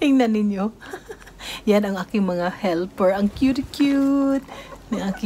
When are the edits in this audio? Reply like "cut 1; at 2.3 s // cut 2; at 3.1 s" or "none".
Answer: none